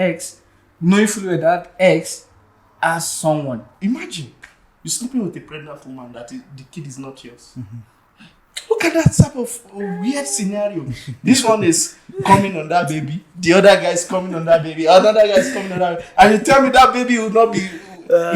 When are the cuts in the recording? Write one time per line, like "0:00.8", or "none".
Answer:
0:03.7